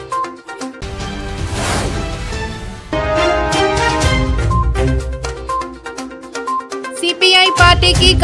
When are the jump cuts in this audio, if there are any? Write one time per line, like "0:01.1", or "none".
0:06.7